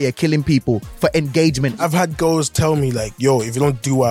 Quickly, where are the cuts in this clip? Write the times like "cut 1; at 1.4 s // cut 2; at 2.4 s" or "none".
cut 1; at 1.8 s

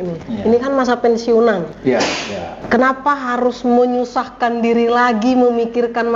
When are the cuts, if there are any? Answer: cut 1; at 2.1 s

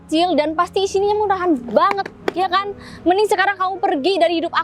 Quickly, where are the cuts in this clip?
none

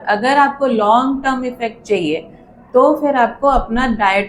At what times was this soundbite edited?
none

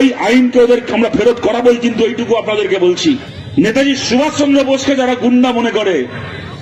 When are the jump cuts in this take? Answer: cut 1; at 3.3 s

